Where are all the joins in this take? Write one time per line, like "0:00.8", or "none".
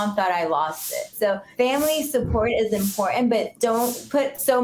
0:01.4